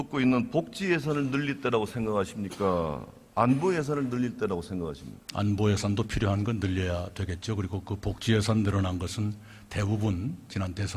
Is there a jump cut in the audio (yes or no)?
yes